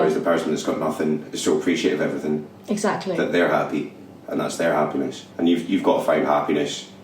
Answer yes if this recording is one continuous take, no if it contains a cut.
no